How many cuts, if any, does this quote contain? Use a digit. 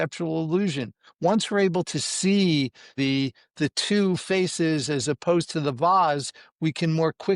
1